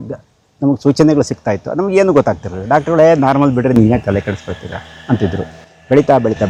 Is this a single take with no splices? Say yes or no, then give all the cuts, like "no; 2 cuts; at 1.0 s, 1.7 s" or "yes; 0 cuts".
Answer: yes; 0 cuts